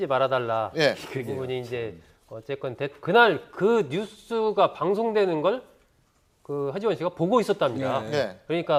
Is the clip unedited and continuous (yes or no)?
yes